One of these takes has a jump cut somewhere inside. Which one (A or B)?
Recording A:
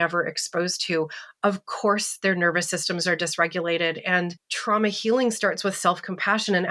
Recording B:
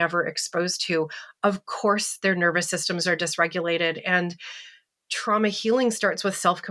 A